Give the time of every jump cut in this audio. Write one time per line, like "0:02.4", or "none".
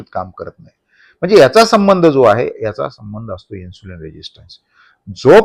none